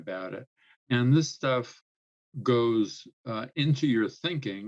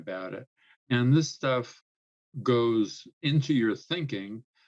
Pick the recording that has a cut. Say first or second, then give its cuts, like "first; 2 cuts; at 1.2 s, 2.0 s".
second; 1 cut; at 3.1 s